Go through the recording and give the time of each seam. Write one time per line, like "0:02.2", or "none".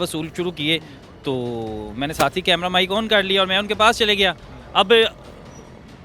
none